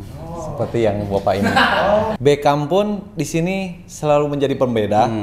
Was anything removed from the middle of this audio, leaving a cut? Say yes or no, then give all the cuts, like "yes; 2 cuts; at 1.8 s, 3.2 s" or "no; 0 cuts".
yes; 1 cut; at 2.1 s